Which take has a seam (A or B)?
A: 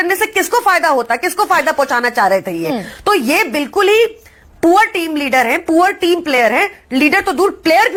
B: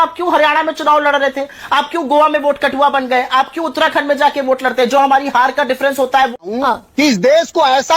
B